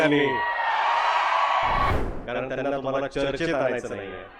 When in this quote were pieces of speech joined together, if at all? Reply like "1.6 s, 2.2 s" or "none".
1.9 s

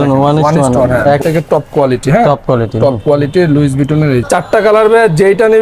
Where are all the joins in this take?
1.2 s, 4.2 s

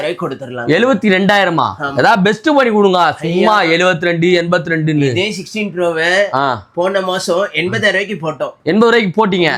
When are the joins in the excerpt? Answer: none

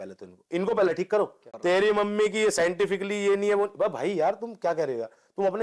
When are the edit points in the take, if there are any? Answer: 1.5 s

